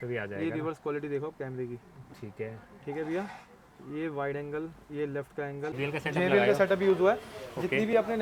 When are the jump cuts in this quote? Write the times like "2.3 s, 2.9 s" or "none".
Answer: 5.8 s